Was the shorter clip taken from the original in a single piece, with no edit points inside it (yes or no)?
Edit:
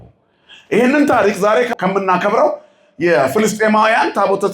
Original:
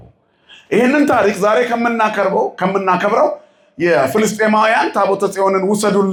no